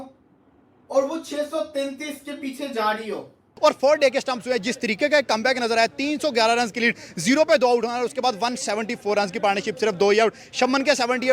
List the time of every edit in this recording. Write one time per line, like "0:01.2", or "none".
0:03.4

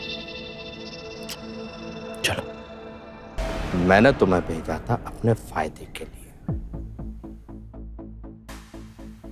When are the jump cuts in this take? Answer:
0:03.4

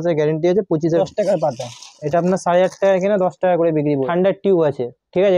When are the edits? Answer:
0:01.0
0:04.0

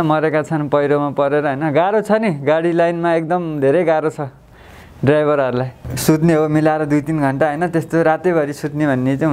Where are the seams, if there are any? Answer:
0:05.8

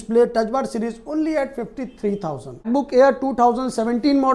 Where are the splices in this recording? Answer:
0:02.7

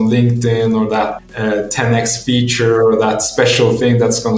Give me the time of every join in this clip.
0:01.2

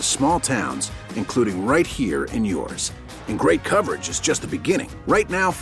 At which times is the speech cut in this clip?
none

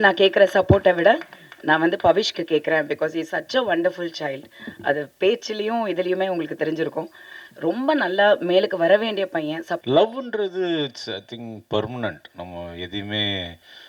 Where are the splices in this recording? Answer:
0:09.8

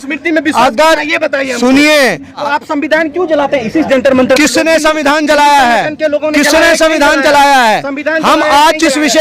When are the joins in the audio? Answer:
0:02.4

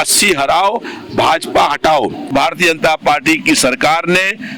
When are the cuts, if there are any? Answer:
0:02.3

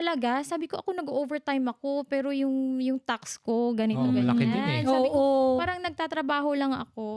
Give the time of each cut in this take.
none

